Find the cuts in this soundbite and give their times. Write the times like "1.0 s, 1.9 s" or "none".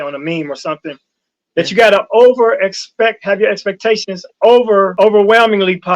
4.9 s

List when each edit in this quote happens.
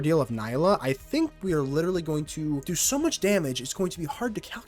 2.7 s

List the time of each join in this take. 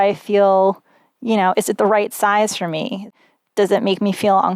3.2 s

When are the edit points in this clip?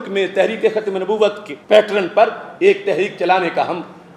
1.5 s

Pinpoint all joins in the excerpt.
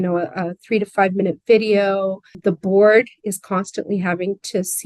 2.4 s

